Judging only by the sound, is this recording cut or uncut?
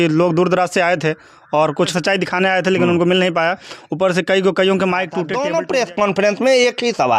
cut